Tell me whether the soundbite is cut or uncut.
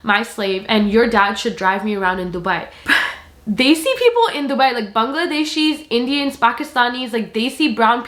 uncut